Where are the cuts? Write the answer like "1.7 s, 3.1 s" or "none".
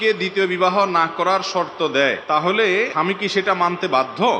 2.2 s, 2.9 s